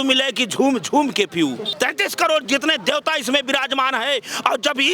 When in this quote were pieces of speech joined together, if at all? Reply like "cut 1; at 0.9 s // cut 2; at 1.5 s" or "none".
cut 1; at 1.7 s